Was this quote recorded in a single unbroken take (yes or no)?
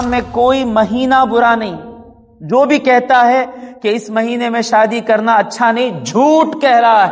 yes